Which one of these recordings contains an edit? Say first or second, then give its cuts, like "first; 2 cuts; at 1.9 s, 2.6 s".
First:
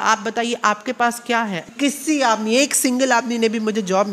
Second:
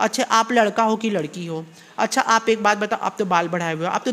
first; 1 cut; at 1.7 s